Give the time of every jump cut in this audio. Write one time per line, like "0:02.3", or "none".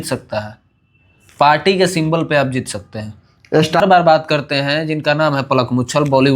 0:03.8